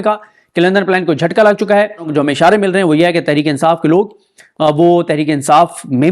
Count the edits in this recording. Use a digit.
1